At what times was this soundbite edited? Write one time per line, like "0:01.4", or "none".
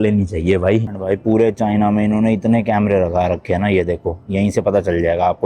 0:00.9